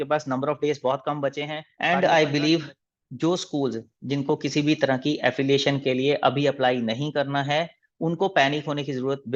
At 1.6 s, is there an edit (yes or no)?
yes